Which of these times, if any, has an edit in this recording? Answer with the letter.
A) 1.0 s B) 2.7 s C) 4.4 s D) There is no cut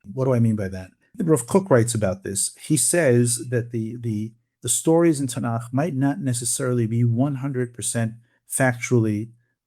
A